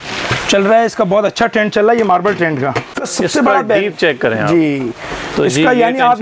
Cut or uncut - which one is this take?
cut